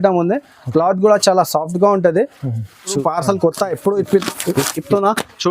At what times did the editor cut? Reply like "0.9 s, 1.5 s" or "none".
3.0 s